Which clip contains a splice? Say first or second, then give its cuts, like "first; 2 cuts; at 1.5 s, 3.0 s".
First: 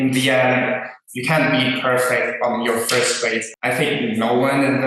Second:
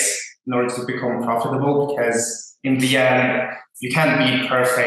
first; 1 cut; at 3.5 s